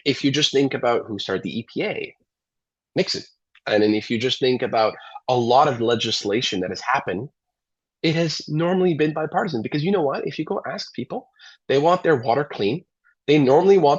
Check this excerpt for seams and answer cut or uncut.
uncut